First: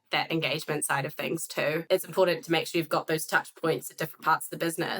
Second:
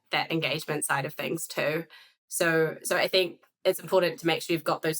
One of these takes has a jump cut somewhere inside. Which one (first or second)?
first